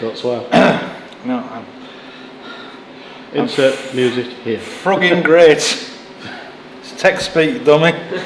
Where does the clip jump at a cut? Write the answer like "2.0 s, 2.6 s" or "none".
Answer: none